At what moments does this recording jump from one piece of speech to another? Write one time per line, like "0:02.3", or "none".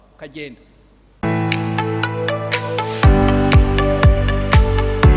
0:01.2